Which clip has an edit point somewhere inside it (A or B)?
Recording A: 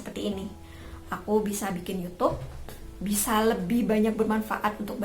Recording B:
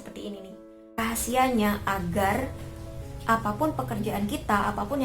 B